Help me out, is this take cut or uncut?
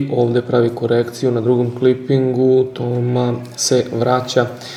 uncut